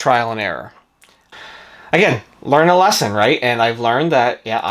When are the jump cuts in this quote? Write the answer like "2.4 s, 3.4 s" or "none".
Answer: 1.3 s